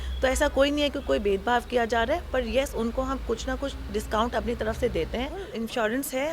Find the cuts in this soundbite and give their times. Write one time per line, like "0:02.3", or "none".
0:05.4